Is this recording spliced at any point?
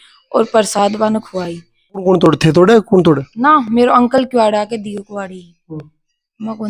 yes; 1 cut; at 2.0 s

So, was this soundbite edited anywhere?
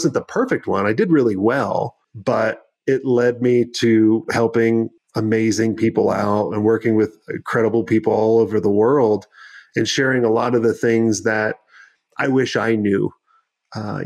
yes; 2 cuts; at 2.0 s, 5.0 s

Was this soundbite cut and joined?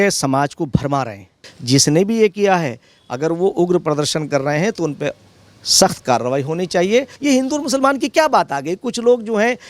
yes; 2 cuts; at 1.5 s, 7.1 s

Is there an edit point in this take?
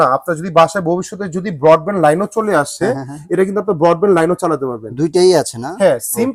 no; 0 cuts

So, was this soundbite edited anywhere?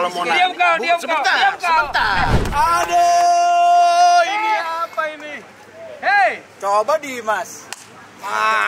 yes; 1 cut; at 2.4 s

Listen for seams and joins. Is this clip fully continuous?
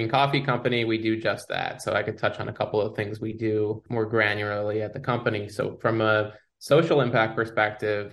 no; 1 cut; at 3.8 s

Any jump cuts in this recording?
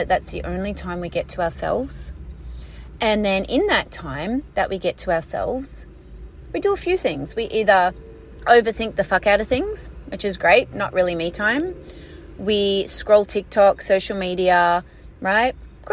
no; 0 cuts

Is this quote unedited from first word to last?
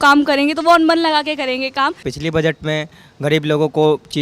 no; 1 cut; at 2.1 s

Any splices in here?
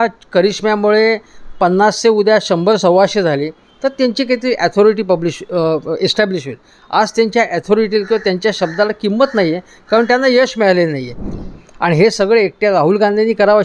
yes; 1 cut; at 11.2 s

